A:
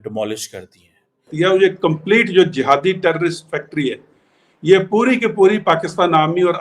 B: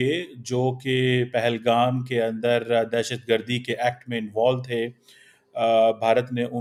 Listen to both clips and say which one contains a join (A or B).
A